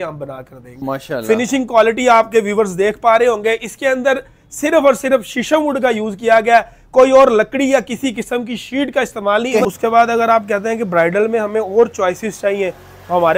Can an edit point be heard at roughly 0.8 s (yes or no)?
yes